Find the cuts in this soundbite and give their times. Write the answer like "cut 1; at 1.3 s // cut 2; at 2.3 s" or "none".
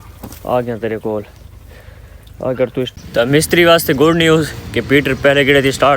cut 1; at 2.9 s